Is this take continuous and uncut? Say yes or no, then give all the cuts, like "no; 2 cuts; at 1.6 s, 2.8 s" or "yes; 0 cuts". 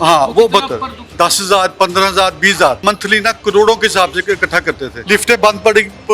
no; 3 cuts; at 1.1 s, 2.8 s, 4.9 s